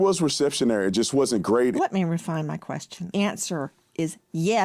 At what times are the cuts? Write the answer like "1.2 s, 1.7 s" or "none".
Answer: 1.7 s, 3.1 s